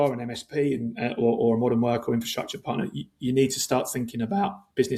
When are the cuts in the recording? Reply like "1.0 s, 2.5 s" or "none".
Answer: none